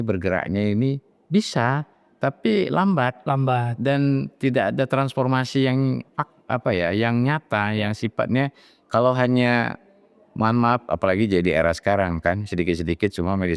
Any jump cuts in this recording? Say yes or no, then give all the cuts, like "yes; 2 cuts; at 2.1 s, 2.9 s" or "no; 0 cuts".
no; 0 cuts